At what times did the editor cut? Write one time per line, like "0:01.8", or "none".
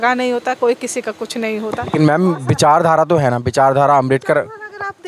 none